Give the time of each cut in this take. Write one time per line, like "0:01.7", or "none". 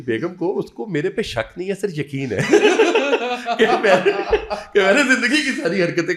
none

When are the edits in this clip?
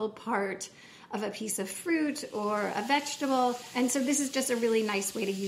0:03.7

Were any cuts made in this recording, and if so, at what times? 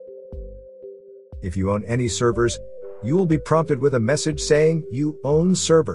0:01.4

